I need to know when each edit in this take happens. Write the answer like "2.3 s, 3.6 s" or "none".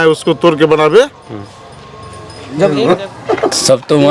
2.7 s